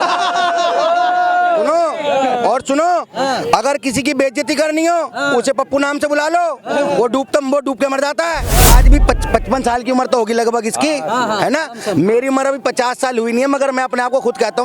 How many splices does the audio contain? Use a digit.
1